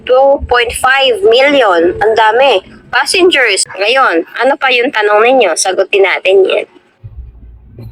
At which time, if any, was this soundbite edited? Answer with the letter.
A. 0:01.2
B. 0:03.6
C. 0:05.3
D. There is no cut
B